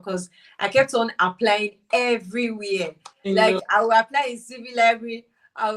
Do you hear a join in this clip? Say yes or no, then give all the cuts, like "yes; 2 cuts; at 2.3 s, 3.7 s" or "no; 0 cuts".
no; 0 cuts